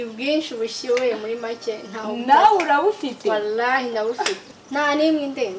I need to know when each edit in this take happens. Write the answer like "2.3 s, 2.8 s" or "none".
4.4 s

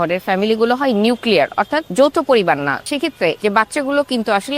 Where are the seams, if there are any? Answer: 1.8 s, 2.9 s

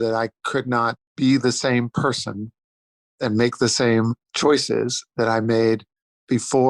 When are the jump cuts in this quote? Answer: 1.1 s, 4.2 s

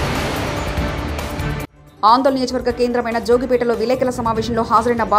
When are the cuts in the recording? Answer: 1.8 s

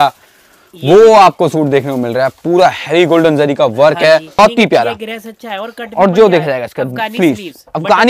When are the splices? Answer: 4.4 s

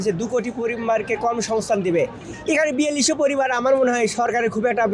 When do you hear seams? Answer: none

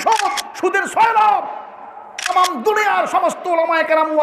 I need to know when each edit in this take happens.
2.3 s

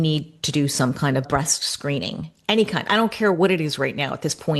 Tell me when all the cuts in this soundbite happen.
1.2 s

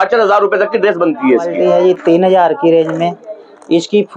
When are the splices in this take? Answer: 1.7 s

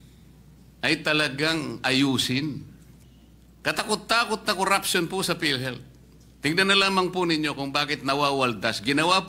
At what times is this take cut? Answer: 2.6 s

